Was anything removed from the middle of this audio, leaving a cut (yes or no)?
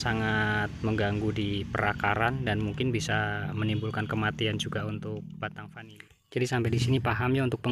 yes